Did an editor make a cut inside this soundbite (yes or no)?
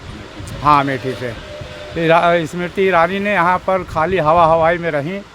no